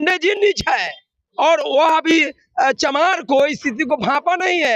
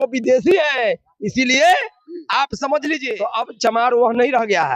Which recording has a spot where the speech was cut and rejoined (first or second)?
second